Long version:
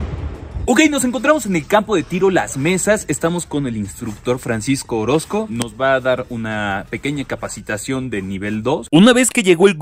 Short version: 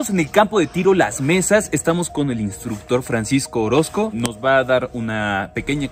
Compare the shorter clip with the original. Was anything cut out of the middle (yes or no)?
no